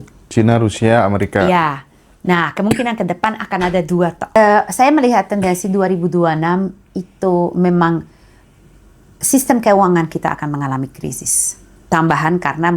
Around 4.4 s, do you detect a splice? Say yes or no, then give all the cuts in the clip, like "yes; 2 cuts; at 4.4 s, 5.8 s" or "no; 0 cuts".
yes; 1 cut; at 4.4 s